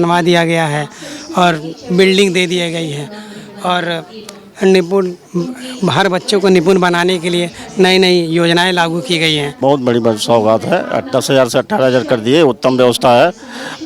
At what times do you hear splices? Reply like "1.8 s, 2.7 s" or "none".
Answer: 9.5 s